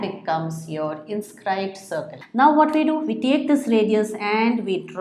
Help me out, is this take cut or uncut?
cut